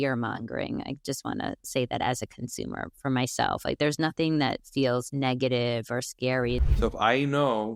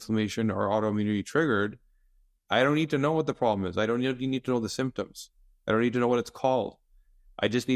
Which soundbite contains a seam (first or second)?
first